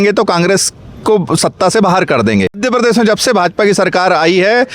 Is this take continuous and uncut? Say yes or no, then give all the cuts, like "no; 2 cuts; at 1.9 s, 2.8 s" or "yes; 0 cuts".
no; 1 cut; at 2.6 s